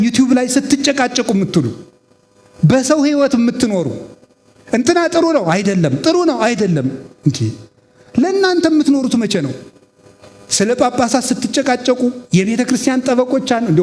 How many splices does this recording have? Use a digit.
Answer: 0